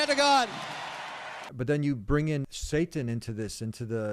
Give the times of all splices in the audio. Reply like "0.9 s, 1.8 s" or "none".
1.4 s, 2.6 s